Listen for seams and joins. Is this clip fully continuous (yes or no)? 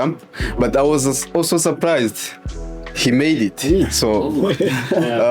yes